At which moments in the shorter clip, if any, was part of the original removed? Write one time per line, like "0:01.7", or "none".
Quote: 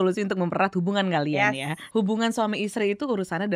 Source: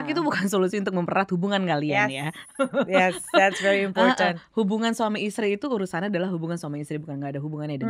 0:01.8